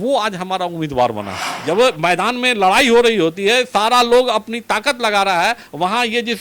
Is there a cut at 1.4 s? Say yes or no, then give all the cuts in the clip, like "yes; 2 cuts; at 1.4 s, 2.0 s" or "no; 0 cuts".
yes; 1 cut; at 1.4 s